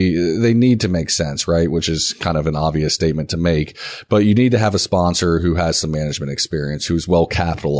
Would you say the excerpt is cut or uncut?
uncut